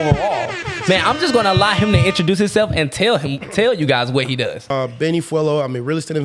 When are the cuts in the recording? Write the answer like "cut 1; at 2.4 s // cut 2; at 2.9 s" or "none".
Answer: cut 1; at 4.7 s